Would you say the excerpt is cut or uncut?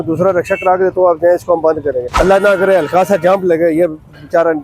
cut